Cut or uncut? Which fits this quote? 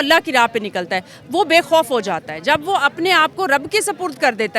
uncut